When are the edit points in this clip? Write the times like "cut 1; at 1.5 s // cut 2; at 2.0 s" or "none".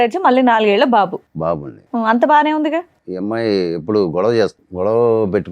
cut 1; at 3.0 s // cut 2; at 4.6 s

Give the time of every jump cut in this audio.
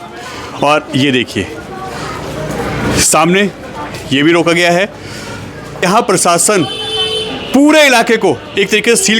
cut 1; at 5.8 s

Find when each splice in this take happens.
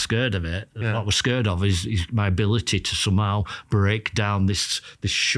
none

